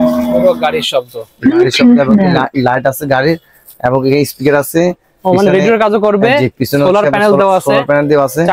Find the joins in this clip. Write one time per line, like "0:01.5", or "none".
none